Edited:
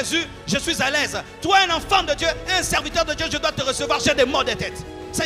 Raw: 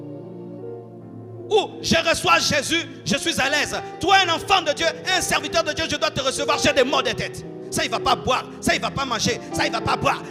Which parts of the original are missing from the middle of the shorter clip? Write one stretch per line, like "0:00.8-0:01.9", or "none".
none